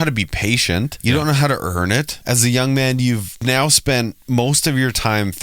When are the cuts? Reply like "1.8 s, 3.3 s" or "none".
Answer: 0.9 s, 2.1 s, 3.4 s